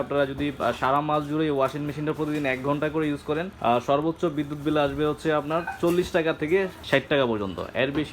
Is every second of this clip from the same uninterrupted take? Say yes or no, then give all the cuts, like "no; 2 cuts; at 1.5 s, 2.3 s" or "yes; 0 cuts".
no; 2 cuts; at 3.5 s, 6.8 s